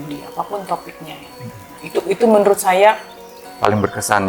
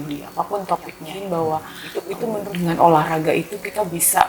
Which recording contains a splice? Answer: second; 1 cut; at 1.1 s

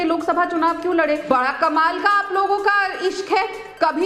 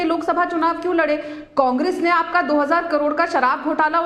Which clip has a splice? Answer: first; 1 cut; at 1.2 s

